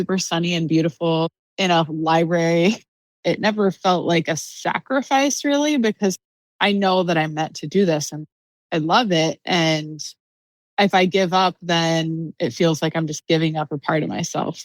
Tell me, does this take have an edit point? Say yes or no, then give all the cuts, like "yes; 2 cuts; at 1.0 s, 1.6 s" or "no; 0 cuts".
yes; 2 cuts; at 1.3 s, 2.9 s